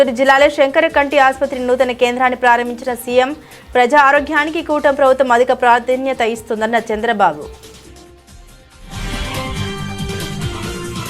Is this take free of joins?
no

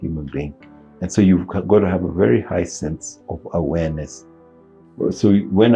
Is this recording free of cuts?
yes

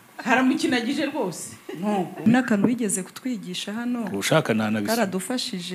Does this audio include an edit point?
yes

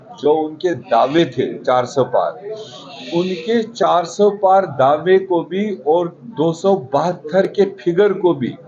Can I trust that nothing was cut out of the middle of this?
yes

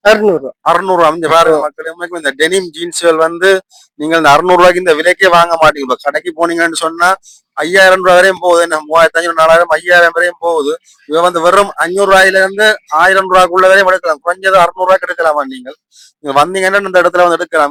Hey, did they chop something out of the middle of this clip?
no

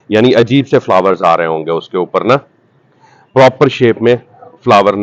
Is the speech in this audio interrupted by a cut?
no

